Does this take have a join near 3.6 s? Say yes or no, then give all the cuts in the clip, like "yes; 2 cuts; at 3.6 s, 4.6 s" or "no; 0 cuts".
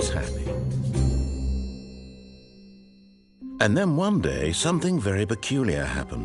yes; 1 cut; at 3.6 s